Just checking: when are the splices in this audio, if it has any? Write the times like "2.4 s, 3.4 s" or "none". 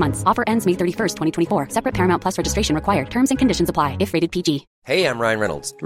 4.7 s